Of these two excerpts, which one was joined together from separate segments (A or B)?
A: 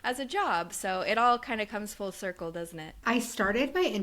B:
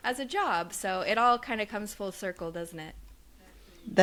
A